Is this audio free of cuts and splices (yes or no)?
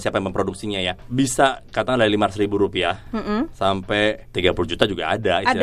no